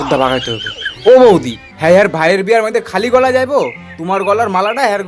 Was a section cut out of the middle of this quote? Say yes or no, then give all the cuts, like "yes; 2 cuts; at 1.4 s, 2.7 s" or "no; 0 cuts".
no; 0 cuts